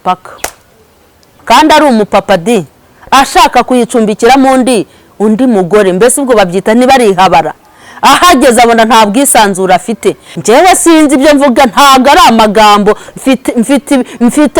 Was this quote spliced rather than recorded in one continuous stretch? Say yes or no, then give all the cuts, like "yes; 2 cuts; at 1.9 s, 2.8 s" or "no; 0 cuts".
yes; 2 cuts; at 1.3 s, 10.3 s